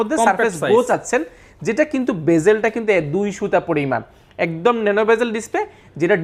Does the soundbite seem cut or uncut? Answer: uncut